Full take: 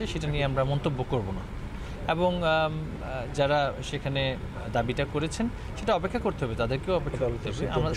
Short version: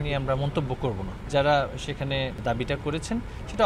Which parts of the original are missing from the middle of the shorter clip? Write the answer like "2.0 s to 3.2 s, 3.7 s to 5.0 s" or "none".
1.5 s to 3.2 s, 4.4 s to 4.6 s